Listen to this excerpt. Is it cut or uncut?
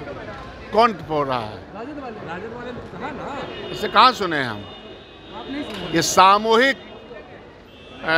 uncut